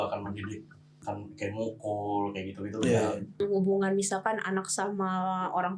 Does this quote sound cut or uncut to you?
cut